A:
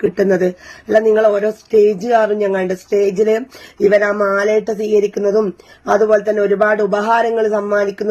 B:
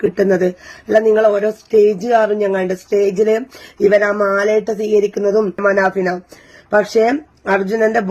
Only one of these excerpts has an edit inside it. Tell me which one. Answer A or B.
B